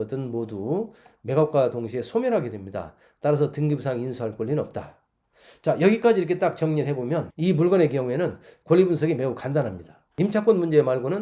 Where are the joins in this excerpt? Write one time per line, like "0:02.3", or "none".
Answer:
none